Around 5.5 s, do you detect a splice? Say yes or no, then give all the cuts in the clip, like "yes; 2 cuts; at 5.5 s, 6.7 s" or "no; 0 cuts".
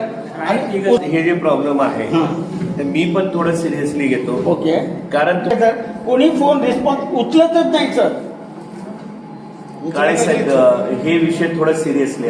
yes; 2 cuts; at 1.0 s, 5.5 s